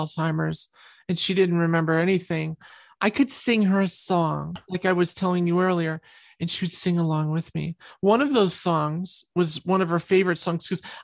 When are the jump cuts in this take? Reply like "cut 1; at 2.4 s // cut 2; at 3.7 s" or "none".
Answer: cut 1; at 4.7 s